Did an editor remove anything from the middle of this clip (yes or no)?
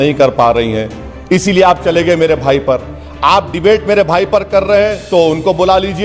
no